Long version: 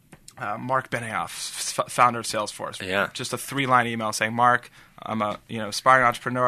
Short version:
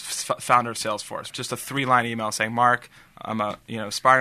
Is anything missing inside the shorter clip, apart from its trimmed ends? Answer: yes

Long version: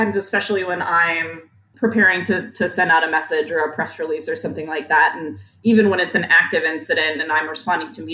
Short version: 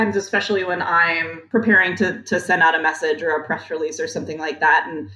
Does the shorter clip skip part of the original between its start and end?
yes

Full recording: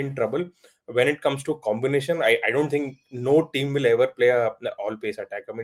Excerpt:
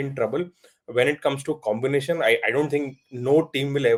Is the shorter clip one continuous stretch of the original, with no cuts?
yes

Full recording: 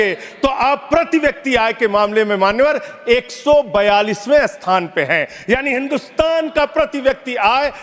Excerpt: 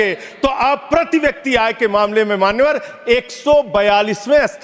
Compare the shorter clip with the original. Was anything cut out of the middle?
no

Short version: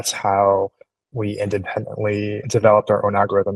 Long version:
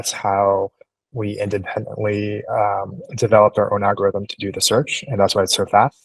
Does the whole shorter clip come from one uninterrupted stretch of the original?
no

